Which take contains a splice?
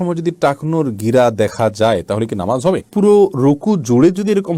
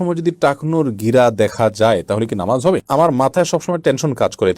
second; 1 cut; at 2.8 s

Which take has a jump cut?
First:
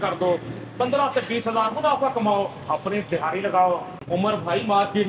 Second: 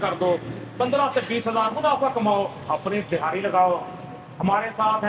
first; 1 cut; at 3.9 s

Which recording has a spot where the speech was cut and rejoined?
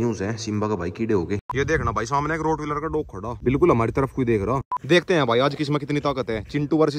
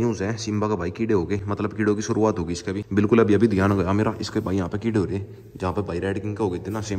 first; 3 cuts; at 1.5 s, 3.4 s, 4.8 s

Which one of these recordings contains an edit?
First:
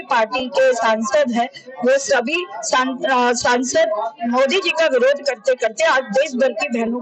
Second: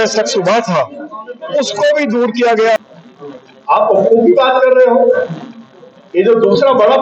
second; 1 cut; at 2.8 s

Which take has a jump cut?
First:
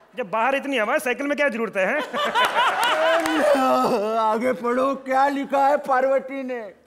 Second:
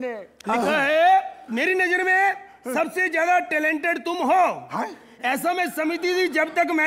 first; 1 cut; at 3.1 s

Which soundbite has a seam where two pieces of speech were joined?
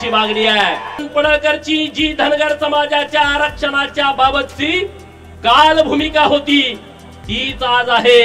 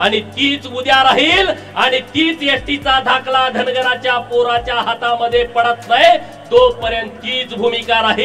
first; 1 cut; at 1.1 s

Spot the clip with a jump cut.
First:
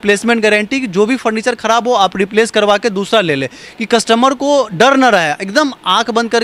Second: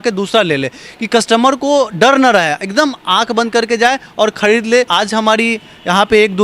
second; 1 cut; at 4.9 s

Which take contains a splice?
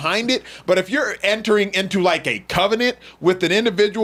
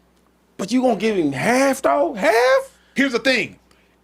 second; 1 cut; at 2.8 s

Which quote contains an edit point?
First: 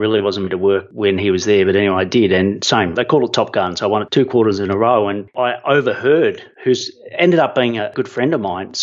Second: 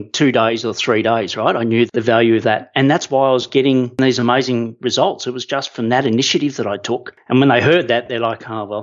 first; 5 cuts; at 2.9 s, 4.1 s, 5.2 s, 6.5 s, 7.9 s

